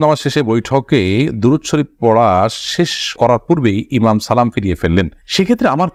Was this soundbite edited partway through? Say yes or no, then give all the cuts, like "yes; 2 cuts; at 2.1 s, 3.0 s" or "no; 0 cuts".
no; 0 cuts